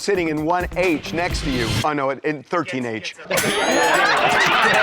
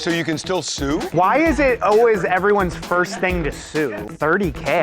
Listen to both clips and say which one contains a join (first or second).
second